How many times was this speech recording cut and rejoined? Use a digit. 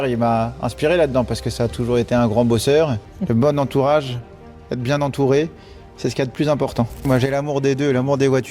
2